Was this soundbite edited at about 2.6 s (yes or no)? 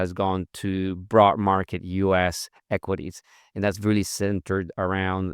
no